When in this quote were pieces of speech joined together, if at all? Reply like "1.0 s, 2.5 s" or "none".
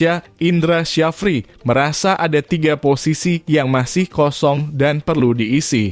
none